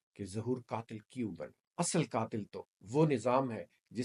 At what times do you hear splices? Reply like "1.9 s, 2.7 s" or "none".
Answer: 1.6 s